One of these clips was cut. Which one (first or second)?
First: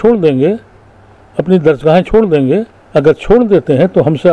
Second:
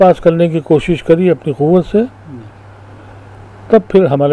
first